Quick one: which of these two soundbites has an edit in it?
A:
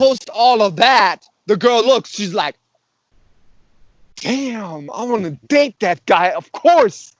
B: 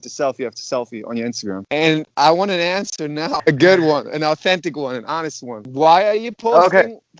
B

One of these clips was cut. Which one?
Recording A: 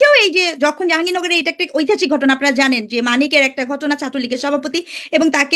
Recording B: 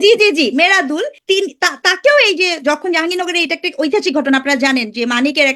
B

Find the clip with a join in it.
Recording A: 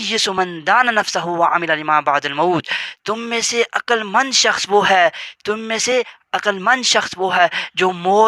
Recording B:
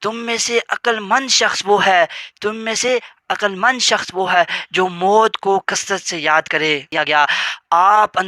B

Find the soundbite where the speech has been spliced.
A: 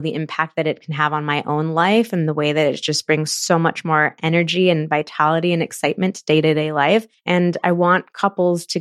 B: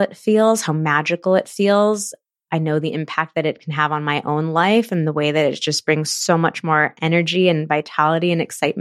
A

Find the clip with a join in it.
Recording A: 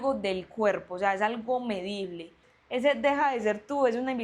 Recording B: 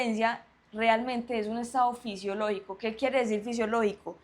A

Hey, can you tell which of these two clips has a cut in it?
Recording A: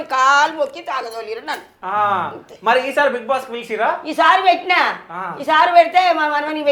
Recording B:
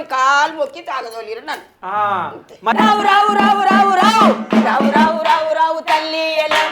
B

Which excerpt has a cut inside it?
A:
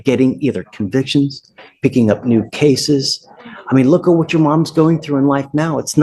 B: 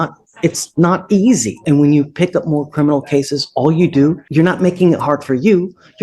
B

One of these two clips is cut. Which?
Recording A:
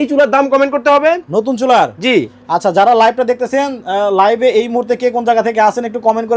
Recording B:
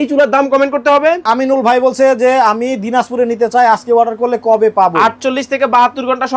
B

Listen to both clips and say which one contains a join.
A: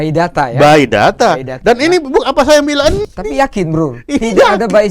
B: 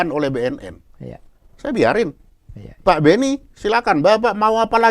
A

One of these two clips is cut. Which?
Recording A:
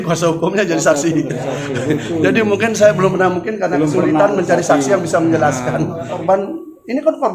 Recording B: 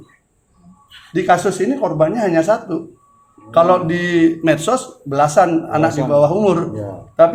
A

